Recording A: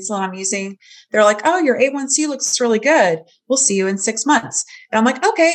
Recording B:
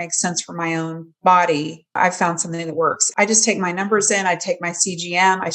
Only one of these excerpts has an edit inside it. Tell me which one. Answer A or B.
B